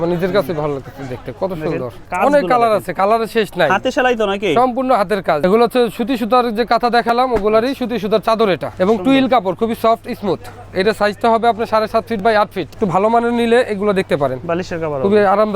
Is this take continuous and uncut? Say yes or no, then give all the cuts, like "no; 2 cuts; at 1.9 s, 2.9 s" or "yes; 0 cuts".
no; 4 cuts; at 2.0 s, 5.4 s, 8.7 s, 12.6 s